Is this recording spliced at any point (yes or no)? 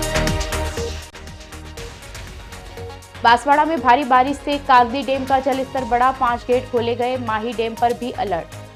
no